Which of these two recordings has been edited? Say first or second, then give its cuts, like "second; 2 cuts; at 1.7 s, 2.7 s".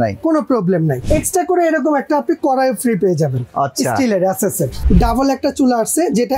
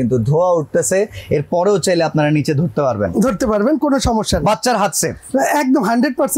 first; 2 cuts; at 1.0 s, 4.8 s